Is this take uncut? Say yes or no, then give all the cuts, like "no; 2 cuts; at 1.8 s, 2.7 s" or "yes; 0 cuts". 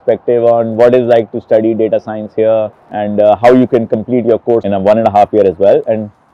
yes; 0 cuts